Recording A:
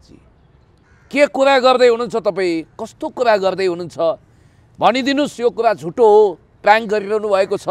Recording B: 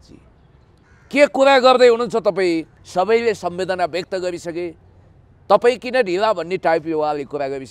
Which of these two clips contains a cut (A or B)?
B